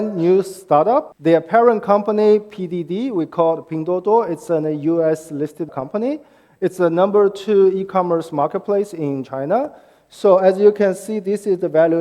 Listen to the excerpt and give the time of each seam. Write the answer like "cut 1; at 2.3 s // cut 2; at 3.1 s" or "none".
cut 1; at 1.1 s // cut 2; at 5.7 s